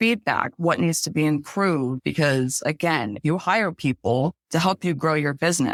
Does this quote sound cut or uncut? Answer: uncut